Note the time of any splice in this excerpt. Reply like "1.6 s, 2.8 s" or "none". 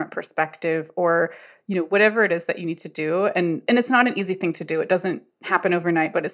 3.6 s